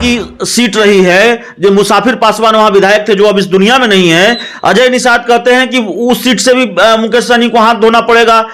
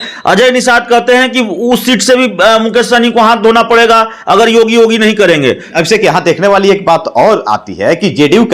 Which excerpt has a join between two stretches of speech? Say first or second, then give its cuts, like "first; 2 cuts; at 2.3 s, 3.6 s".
second; 1 cut; at 5.7 s